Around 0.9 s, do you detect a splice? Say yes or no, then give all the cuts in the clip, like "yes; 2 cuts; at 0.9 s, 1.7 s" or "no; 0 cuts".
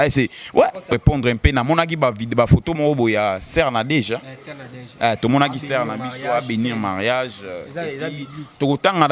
yes; 1 cut; at 0.9 s